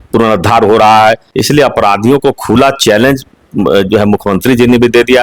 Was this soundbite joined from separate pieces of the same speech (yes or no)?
yes